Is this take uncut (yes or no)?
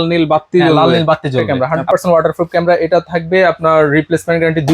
no